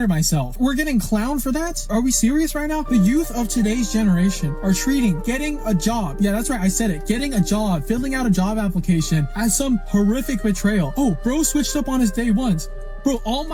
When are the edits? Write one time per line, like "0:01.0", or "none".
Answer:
none